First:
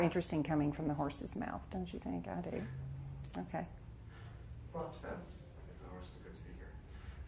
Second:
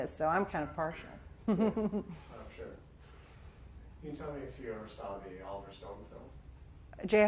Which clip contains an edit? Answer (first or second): first